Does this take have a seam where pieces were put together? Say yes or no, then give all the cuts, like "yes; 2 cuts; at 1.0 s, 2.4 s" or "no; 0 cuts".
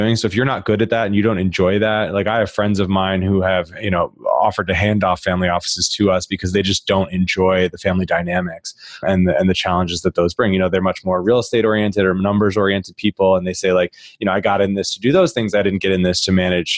no; 0 cuts